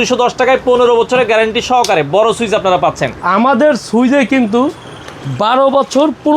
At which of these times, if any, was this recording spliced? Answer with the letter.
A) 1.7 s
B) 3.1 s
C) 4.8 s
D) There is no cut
B